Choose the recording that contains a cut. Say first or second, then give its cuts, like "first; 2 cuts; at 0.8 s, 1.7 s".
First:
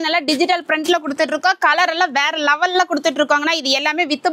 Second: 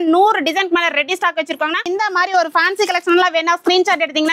second; 1 cut; at 1.9 s